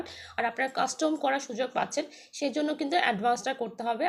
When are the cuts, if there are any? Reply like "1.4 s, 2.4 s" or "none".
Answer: none